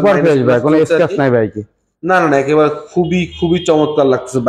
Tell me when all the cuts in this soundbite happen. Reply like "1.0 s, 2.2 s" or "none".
none